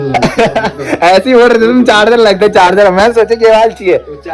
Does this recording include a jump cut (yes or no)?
no